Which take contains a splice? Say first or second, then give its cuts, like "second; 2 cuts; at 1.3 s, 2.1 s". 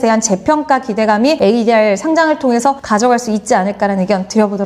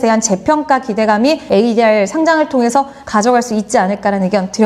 first; 2 cuts; at 1.4 s, 2.8 s